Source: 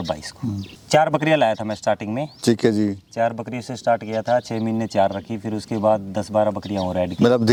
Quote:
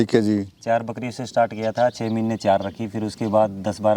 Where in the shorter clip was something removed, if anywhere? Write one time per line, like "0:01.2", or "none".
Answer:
none

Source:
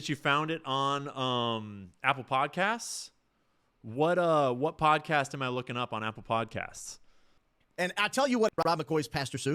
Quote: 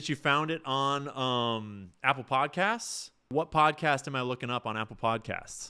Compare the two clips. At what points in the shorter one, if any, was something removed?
0:03.3

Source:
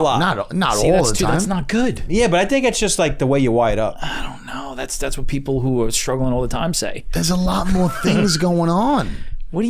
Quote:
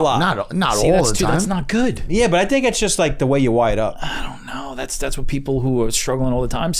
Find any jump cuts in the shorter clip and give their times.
none

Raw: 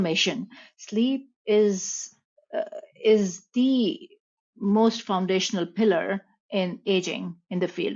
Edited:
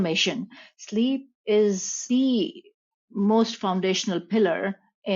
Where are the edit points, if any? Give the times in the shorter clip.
0:02.0

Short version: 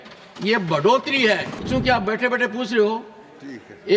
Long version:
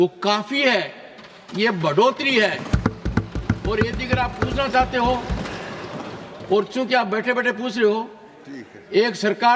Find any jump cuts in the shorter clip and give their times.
0:01.6

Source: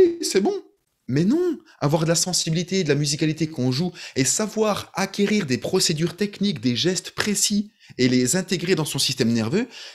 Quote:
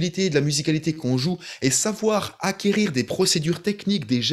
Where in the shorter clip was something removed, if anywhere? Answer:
none

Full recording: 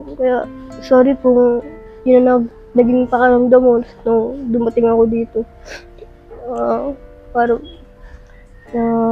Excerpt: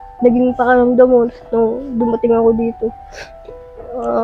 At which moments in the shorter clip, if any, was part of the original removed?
none

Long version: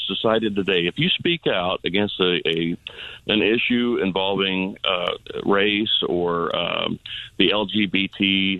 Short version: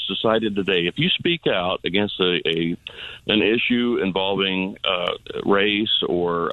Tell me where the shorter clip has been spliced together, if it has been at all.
none

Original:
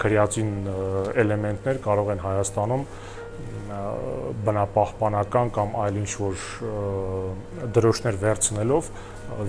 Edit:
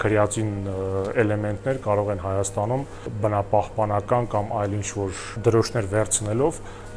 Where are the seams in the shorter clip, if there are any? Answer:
0:03.1
0:05.3

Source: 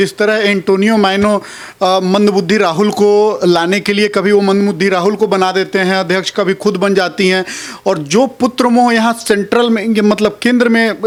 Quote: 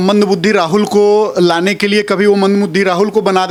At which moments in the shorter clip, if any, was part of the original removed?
none

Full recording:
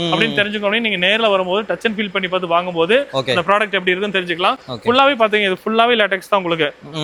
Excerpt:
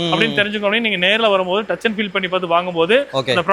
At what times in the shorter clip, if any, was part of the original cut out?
none

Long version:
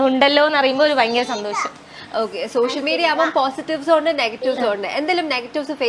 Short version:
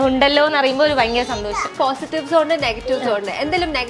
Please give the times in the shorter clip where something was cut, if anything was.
0:01.7

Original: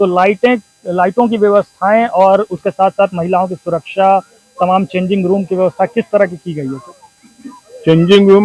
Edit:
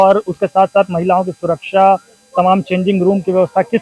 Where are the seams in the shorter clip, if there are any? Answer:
none

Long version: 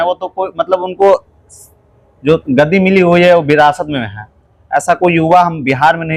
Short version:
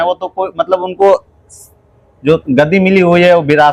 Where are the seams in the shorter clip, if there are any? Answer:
none

